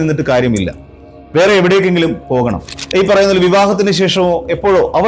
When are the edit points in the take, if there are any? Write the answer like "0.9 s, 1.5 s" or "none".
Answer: 2.7 s